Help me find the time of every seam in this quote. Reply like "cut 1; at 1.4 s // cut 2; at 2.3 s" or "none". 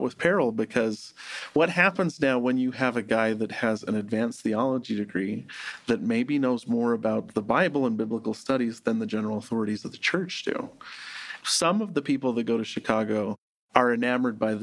none